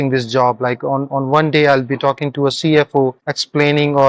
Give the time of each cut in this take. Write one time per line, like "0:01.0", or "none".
none